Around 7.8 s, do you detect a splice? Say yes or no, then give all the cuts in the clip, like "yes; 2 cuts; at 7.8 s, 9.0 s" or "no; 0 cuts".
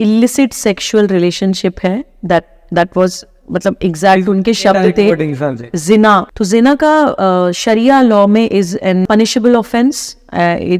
no; 2 cuts; at 6.3 s, 9.0 s